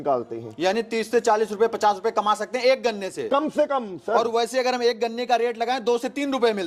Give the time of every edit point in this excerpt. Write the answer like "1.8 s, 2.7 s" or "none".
none